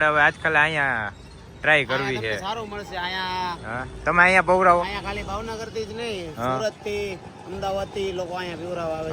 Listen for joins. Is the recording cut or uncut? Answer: uncut